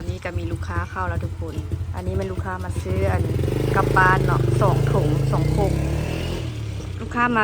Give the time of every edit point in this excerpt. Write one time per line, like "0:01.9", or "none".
none